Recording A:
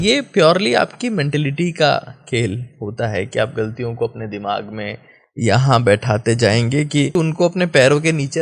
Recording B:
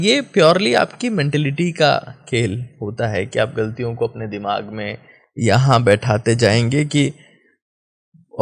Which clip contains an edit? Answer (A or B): A